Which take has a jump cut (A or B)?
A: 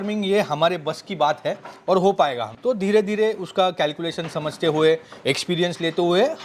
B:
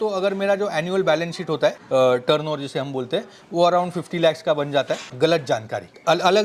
B